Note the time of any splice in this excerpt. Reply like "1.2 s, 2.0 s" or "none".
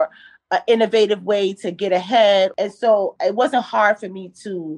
2.5 s